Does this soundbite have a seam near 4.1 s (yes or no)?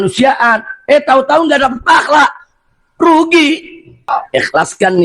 yes